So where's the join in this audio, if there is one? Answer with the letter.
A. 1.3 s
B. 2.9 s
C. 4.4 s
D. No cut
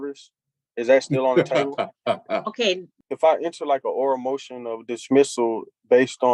B